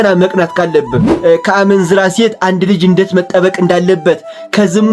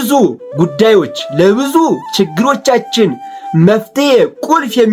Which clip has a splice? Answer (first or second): first